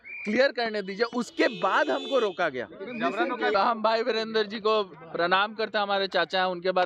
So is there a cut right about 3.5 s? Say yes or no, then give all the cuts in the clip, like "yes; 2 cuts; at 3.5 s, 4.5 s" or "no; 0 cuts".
yes; 1 cut; at 3.5 s